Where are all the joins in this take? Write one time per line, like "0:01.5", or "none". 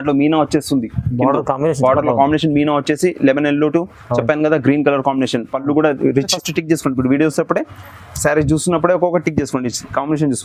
0:06.4